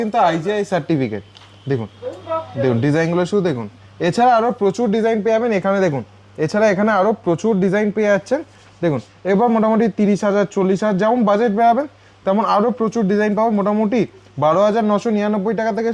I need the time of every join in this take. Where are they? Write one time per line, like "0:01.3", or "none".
none